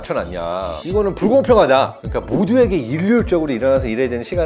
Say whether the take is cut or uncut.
cut